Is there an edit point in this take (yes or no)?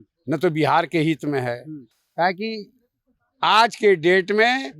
no